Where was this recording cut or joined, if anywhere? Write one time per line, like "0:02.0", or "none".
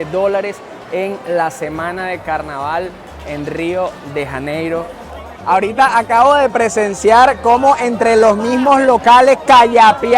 0:05.3